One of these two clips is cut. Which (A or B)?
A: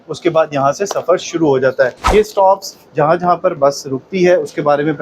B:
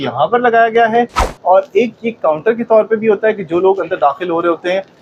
A